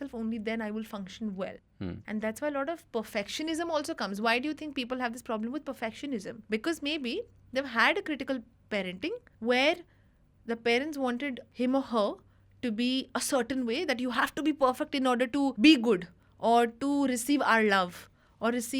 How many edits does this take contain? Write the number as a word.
five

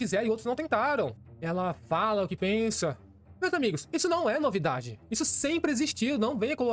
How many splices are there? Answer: one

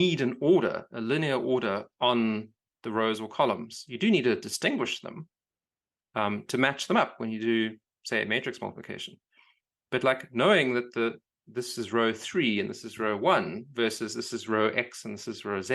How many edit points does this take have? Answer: zero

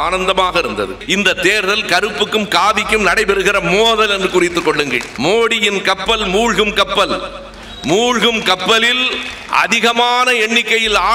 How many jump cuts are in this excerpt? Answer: two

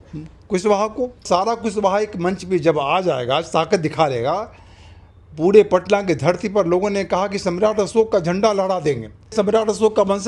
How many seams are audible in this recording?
two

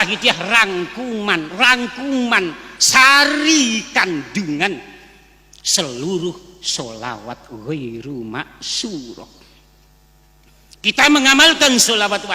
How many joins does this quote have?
zero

